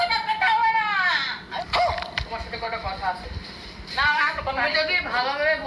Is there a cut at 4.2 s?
no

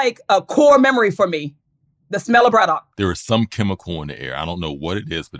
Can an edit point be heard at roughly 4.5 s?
no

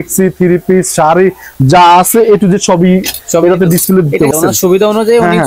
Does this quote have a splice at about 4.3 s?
yes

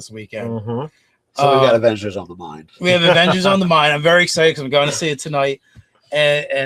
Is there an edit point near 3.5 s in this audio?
yes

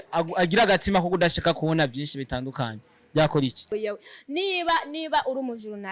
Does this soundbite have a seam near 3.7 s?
yes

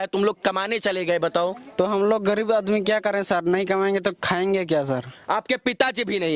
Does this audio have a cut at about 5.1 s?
no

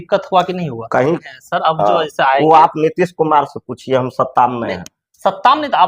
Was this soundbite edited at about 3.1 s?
no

